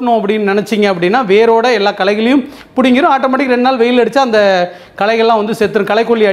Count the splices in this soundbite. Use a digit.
0